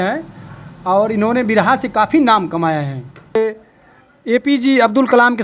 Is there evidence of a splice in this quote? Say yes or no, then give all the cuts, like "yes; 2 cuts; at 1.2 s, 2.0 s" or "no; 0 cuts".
yes; 1 cut; at 3.4 s